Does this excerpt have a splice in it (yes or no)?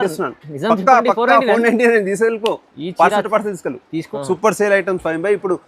yes